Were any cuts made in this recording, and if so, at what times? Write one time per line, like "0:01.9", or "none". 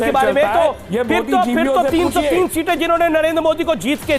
none